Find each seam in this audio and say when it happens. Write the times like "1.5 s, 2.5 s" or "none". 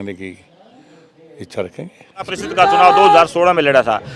2.4 s